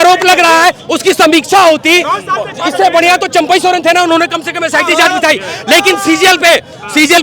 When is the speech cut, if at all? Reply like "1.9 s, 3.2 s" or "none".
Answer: none